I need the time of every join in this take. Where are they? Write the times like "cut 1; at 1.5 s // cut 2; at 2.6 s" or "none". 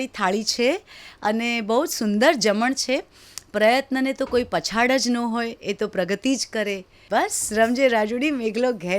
cut 1; at 6.9 s

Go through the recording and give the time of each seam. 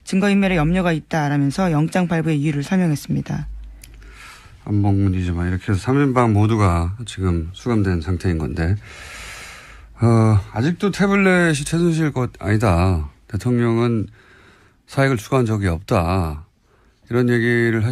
none

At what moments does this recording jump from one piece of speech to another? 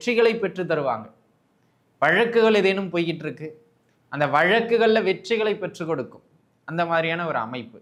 none

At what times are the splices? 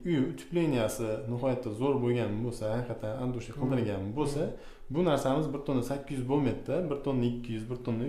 none

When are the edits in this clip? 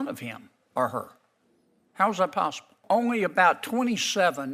cut 1; at 2.8 s

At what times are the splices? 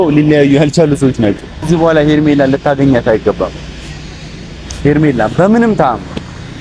cut 1; at 1.7 s

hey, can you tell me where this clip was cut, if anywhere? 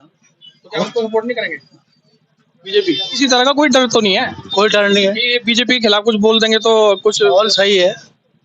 cut 1; at 3.1 s

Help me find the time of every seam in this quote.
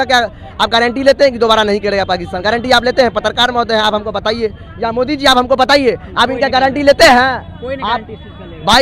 none

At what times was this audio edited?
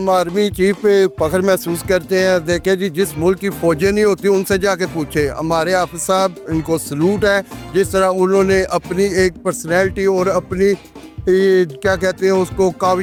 none

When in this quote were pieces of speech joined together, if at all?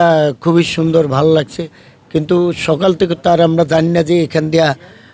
none

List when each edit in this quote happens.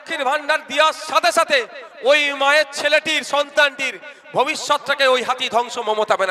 none

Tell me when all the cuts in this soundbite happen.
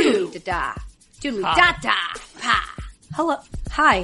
none

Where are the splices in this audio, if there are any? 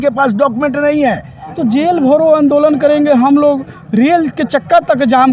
cut 1; at 1.7 s

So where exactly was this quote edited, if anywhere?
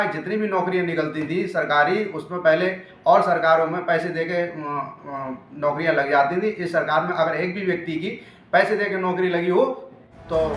none

